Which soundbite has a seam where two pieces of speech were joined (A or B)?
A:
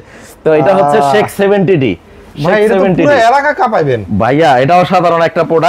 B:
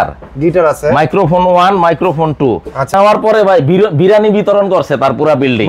B